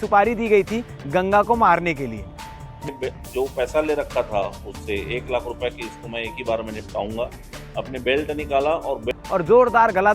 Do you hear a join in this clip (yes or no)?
yes